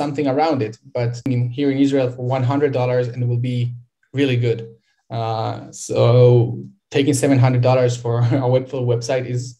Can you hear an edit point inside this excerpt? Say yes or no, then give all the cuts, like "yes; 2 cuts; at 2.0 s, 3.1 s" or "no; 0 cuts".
yes; 1 cut; at 1.2 s